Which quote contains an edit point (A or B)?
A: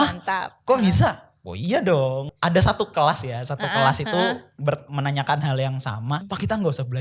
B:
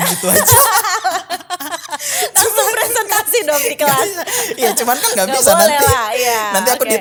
A